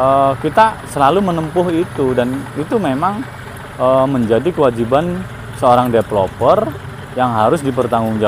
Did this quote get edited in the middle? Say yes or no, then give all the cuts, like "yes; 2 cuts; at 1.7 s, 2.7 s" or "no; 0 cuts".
no; 0 cuts